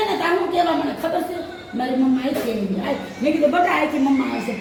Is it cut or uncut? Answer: uncut